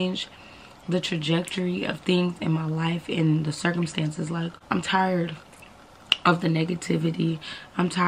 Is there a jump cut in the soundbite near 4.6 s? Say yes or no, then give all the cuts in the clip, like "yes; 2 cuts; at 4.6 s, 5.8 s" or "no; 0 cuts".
yes; 1 cut; at 4.6 s